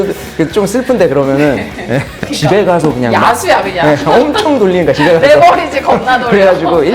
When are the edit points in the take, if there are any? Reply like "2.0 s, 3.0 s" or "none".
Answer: 2.3 s